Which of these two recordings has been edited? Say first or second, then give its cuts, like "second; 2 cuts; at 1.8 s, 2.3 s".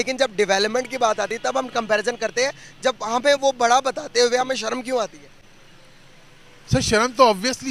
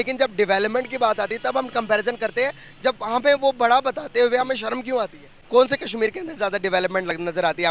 second; 1 cut; at 5.3 s